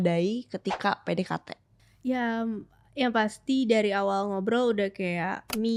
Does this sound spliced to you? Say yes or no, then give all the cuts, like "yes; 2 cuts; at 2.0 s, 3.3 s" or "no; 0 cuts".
no; 0 cuts